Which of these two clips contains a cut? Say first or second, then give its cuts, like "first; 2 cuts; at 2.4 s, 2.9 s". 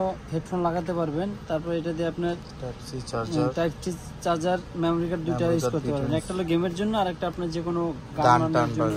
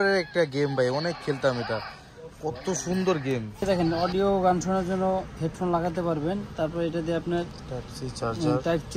second; 1 cut; at 3.6 s